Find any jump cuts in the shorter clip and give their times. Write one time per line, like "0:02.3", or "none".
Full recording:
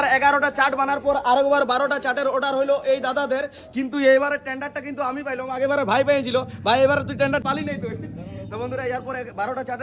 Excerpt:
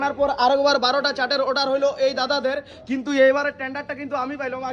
none